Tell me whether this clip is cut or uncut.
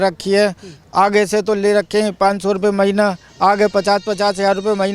uncut